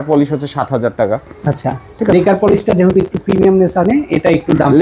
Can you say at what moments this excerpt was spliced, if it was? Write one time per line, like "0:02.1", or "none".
none